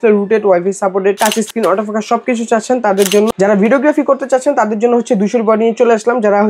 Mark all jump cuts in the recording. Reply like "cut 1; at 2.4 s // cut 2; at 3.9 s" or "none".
cut 1; at 3.3 s